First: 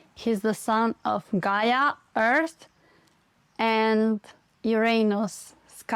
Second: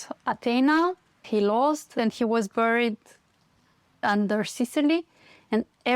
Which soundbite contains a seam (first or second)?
second